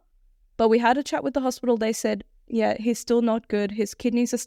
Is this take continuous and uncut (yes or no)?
yes